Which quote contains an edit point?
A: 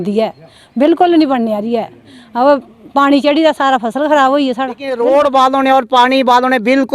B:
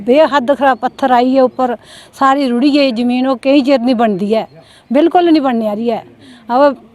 A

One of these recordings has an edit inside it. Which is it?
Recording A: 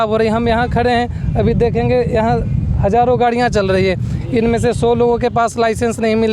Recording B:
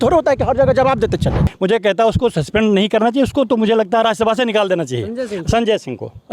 B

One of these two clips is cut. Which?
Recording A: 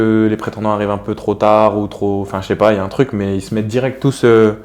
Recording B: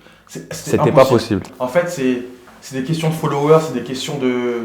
B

